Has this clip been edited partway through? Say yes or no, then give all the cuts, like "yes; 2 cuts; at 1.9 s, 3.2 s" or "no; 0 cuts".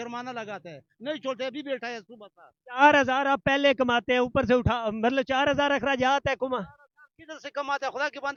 no; 0 cuts